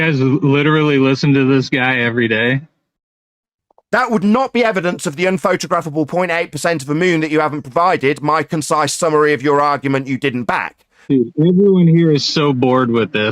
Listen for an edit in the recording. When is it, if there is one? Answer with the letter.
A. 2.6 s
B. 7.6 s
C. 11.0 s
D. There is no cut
C